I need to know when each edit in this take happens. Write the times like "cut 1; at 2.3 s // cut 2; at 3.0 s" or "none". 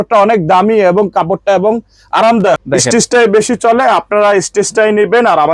cut 1; at 2.6 s